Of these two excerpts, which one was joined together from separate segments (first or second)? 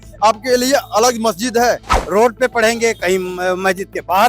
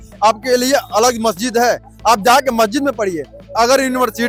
first